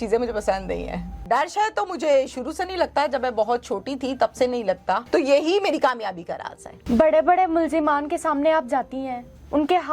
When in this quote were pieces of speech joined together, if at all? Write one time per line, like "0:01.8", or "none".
0:01.2
0:05.0